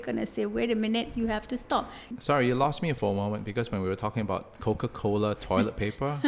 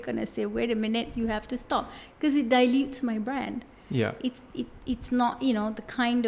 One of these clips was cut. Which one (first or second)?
first